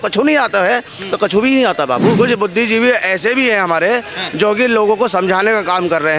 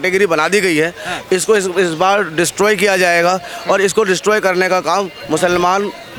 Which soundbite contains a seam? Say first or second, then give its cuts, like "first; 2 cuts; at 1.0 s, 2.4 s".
first; 1 cut; at 2.1 s